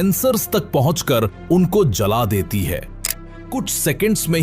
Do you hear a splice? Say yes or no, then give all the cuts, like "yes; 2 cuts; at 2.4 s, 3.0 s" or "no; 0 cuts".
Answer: yes; 1 cut; at 3.3 s